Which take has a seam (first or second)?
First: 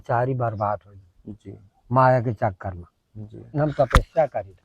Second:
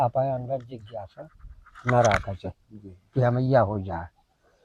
first